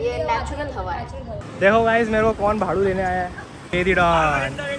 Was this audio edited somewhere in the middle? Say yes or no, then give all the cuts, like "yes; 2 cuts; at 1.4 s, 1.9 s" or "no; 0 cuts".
yes; 2 cuts; at 1.5 s, 3.6 s